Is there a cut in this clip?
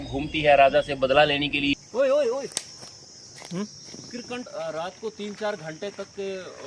yes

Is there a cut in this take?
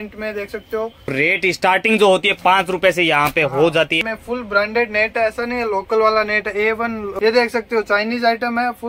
yes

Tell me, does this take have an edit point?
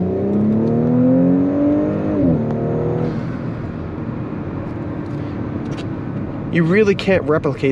no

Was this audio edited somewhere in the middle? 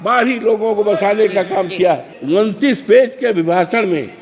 yes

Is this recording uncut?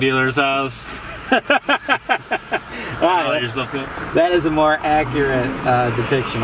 yes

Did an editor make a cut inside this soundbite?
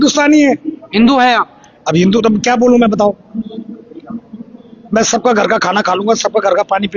no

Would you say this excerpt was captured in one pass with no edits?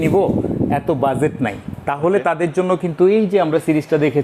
yes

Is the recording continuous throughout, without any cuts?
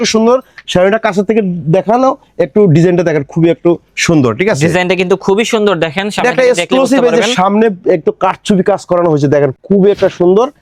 yes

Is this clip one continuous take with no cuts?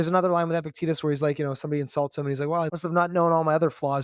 no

